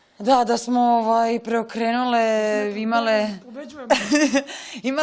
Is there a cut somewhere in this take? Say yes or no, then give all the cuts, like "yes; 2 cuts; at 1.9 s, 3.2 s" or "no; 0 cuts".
yes; 1 cut; at 1.7 s